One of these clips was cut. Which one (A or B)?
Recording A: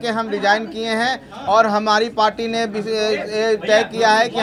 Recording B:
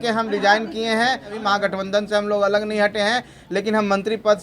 B